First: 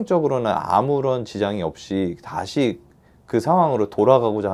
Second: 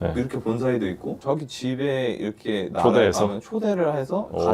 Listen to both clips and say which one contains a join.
second; 1 cut; at 1.2 s

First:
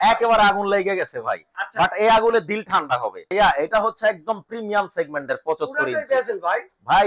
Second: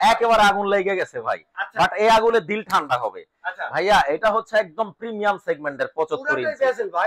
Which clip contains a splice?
first; 1 cut; at 3.2 s

